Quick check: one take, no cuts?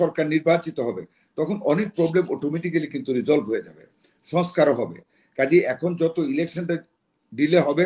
yes; 0 cuts

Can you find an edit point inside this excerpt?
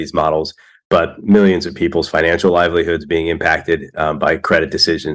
no; 0 cuts

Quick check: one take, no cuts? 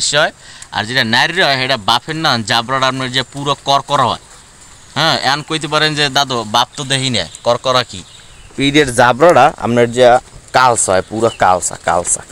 yes; 0 cuts

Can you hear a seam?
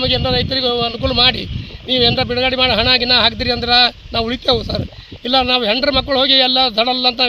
no; 0 cuts

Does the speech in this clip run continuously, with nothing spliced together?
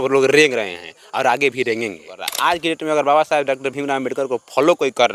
no; 1 cut; at 2.3 s

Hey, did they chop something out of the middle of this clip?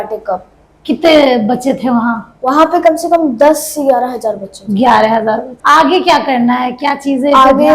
yes; 1 cut; at 5.5 s

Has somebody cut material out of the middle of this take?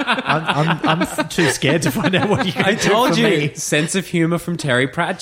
no; 0 cuts

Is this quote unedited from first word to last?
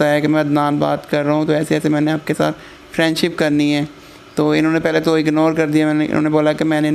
yes; 0 cuts

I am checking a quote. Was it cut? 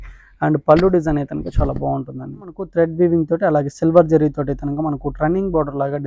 yes; 1 cut; at 2.6 s

